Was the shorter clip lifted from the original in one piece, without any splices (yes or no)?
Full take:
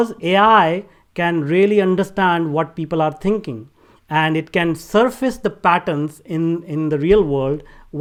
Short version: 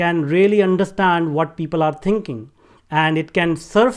yes